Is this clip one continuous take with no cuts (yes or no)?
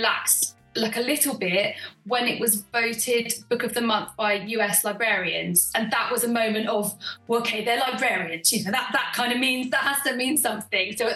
yes